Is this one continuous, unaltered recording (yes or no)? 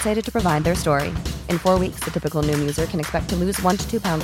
yes